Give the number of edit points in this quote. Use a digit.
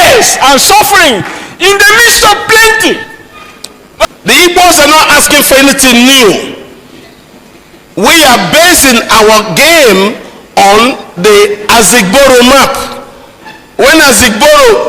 1